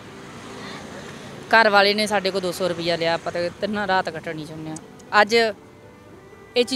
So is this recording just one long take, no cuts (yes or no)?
yes